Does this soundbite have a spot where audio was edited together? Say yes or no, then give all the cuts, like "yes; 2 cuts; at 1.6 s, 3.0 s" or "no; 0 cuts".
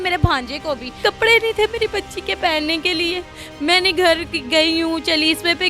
yes; 1 cut; at 1.0 s